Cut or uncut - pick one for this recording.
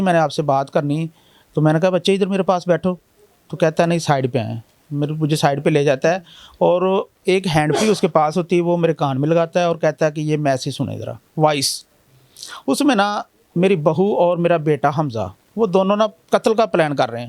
uncut